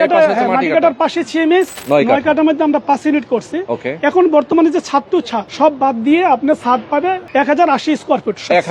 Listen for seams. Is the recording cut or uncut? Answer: cut